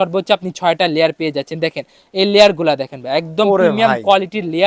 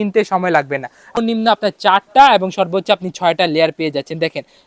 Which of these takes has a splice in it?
second; 1 cut; at 1.2 s

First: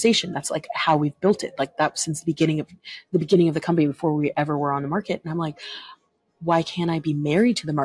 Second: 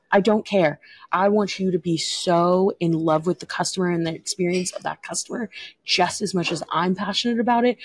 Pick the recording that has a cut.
second; 1 cut; at 1.0 s

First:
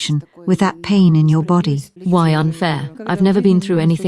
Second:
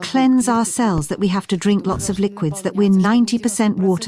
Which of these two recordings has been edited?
first; 2 cuts; at 1.9 s, 3.0 s

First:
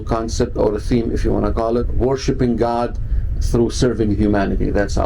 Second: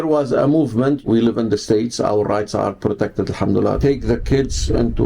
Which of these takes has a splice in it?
second; 2 cuts; at 1.0 s, 3.8 s

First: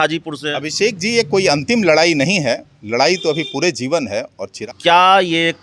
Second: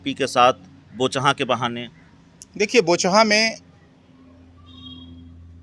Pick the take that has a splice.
first; 1 cut; at 4.5 s

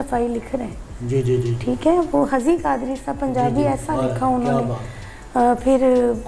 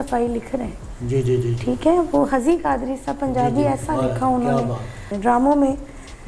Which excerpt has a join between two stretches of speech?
second; 1 cut; at 5.1 s

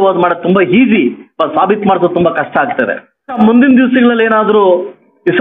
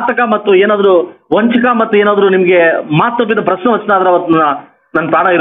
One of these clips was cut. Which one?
first; 1 cut; at 3.4 s

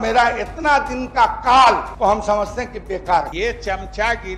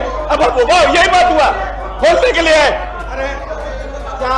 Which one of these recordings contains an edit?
first; 2 cuts; at 1.9 s, 3.3 s

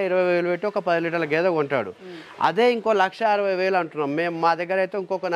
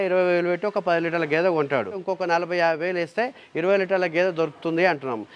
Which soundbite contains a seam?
second; 1 cut; at 2.0 s

